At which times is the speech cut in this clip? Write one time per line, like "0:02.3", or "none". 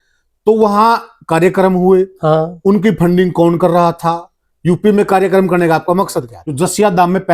0:06.4